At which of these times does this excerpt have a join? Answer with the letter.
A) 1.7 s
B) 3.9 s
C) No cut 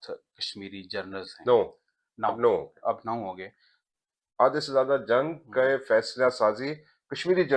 B